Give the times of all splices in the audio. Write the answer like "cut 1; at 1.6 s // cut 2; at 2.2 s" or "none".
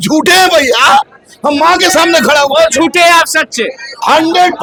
none